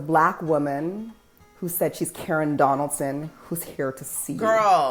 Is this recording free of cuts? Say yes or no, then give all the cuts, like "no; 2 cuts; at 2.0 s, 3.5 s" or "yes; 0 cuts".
yes; 0 cuts